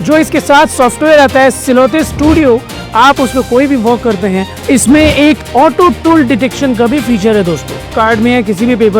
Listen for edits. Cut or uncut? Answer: cut